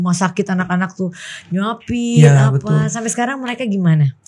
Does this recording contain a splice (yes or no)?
no